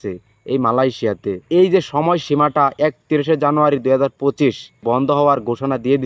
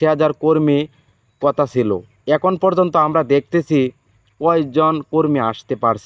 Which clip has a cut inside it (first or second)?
first